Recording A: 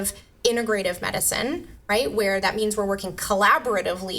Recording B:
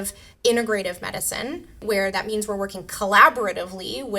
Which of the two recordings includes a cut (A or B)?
B